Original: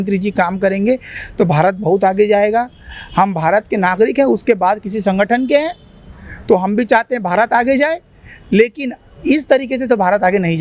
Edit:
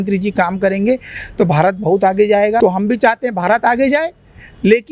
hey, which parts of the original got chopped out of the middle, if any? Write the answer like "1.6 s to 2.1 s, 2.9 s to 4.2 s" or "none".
2.6 s to 6.5 s